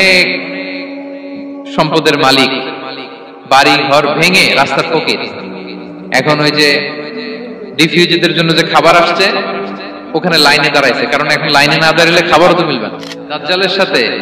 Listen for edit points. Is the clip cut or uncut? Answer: cut